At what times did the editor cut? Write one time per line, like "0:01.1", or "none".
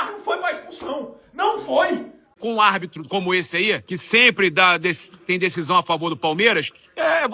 0:02.3
0:03.9